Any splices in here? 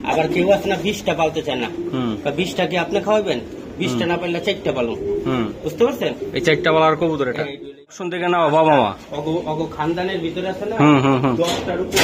yes; 1 cut; at 8.1 s

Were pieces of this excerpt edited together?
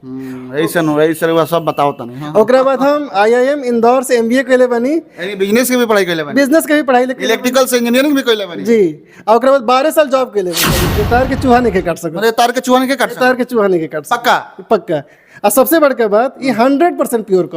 yes; 1 cut; at 10.9 s

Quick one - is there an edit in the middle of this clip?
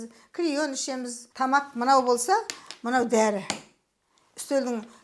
yes; 1 cut; at 1.2 s

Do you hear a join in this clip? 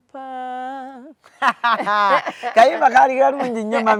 no; 0 cuts

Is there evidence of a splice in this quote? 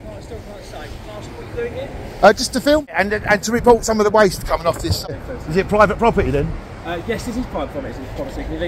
yes; 2 cuts; at 3.4 s, 5.1 s

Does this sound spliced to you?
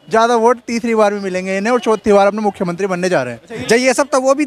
yes; 1 cut; at 3.5 s

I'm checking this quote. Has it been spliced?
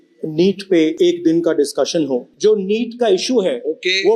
yes; 2 cuts; at 0.9 s, 2.3 s

